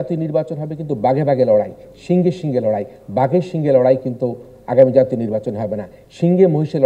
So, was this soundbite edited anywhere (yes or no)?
no